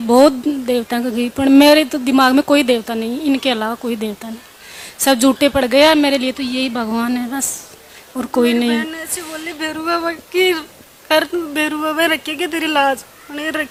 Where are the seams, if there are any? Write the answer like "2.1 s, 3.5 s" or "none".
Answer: none